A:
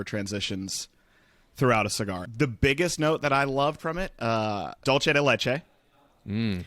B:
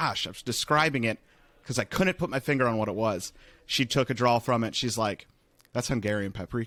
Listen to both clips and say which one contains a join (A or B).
A